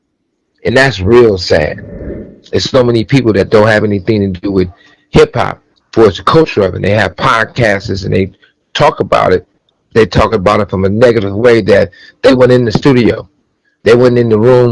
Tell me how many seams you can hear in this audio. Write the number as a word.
one